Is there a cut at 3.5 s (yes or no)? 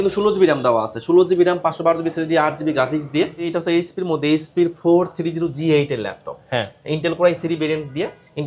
yes